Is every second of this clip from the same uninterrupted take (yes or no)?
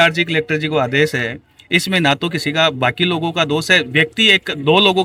yes